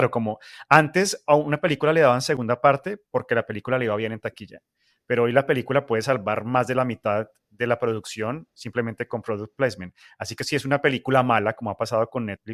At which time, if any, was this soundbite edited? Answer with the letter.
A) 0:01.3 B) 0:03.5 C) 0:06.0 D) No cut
D